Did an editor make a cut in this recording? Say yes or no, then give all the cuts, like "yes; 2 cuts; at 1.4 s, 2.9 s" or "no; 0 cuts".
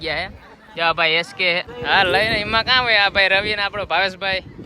yes; 1 cut; at 1.7 s